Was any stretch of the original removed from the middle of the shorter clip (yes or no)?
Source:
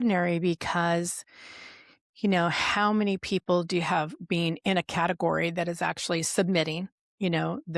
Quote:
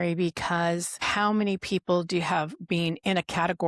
yes